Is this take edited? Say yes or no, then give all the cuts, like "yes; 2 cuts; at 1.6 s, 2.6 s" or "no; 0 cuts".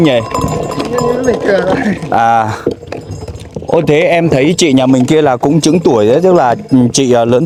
no; 0 cuts